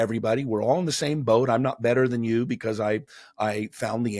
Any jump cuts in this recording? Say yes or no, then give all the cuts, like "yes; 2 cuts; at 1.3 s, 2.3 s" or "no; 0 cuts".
no; 0 cuts